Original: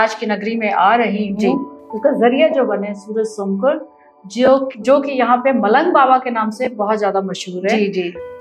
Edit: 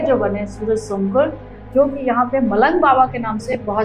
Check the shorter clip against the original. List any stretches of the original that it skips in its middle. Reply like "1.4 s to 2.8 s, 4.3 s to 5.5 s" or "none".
4.1 s to 4.7 s